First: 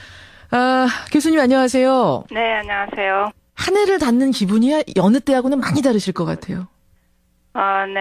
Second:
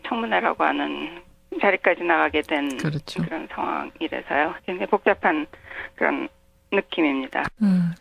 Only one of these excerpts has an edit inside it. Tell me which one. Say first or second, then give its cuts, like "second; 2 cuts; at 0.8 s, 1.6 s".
second; 1 cut; at 5.6 s